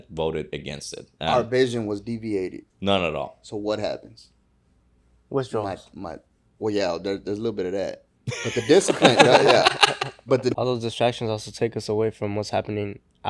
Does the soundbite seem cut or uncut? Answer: cut